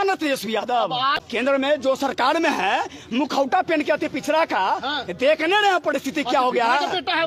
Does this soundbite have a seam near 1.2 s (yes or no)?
yes